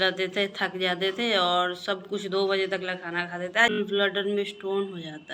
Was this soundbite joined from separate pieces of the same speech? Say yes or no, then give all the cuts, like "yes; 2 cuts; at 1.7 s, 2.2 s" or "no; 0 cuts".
yes; 1 cut; at 3.7 s